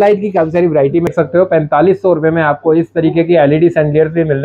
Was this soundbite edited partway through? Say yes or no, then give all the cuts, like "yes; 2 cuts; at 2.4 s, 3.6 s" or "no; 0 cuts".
yes; 1 cut; at 1.1 s